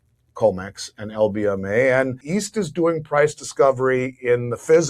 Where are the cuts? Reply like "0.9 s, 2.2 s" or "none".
2.2 s